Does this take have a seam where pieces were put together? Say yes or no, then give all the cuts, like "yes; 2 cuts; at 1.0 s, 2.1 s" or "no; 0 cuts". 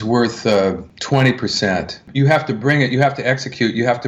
yes; 1 cut; at 0.9 s